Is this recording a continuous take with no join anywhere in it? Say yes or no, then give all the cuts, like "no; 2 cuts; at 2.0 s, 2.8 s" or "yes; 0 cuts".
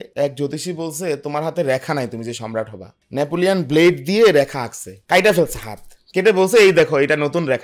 yes; 0 cuts